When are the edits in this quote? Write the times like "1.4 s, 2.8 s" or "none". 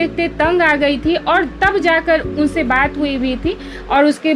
none